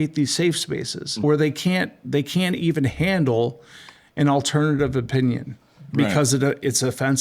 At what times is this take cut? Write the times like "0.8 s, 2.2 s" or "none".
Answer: 1.2 s